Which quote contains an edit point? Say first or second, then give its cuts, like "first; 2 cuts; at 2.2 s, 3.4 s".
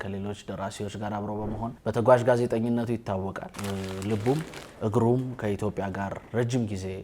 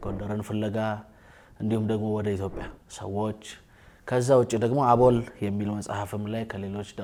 first; 2 cuts; at 1.8 s, 3.5 s